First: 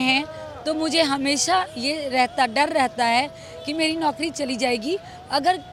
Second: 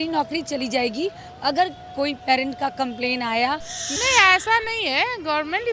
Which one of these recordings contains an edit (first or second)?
second